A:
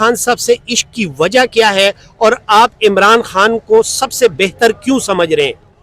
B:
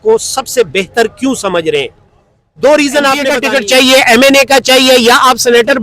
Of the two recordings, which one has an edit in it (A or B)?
B